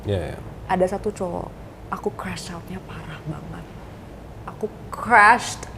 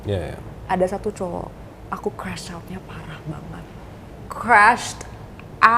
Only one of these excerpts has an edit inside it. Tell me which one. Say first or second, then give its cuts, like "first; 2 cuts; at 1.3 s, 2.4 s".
second; 1 cut; at 4.2 s